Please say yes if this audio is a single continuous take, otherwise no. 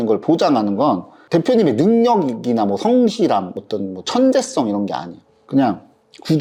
yes